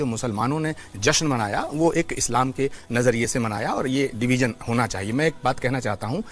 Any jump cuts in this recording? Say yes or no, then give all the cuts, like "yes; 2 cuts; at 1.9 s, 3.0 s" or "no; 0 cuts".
no; 0 cuts